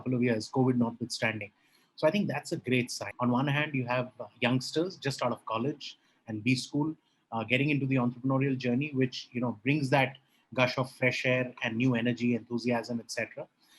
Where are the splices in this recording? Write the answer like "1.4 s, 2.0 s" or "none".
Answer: 3.0 s